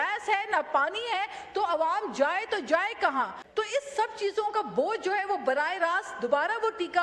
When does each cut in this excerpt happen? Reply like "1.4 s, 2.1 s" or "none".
3.4 s